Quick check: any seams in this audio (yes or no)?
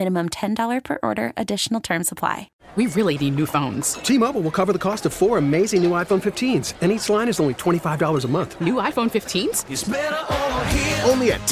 yes